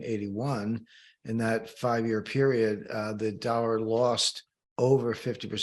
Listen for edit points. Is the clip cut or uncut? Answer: uncut